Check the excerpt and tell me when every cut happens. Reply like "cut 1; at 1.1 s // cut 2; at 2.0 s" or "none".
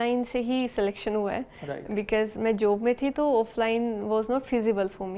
none